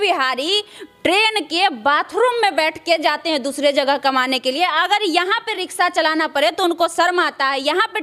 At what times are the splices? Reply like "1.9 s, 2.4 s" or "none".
none